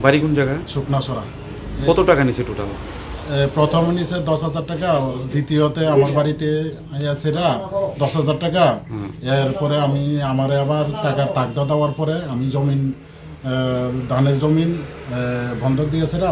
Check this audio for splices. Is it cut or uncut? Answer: uncut